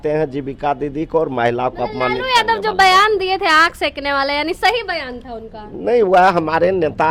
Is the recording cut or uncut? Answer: uncut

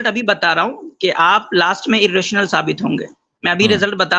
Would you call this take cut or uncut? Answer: uncut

